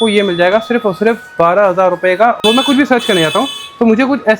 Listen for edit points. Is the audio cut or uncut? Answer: cut